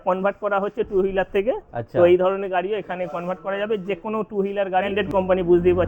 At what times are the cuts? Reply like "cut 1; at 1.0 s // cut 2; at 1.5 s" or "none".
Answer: cut 1; at 4.9 s